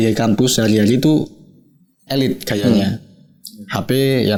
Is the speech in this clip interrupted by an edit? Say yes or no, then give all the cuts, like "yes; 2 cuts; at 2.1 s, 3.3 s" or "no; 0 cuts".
no; 0 cuts